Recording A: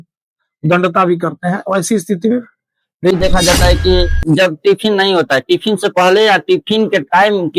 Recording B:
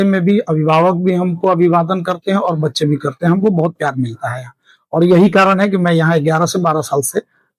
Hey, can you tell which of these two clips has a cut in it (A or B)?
A